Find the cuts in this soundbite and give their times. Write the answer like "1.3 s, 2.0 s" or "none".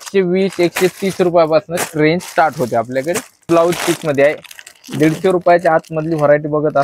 3.4 s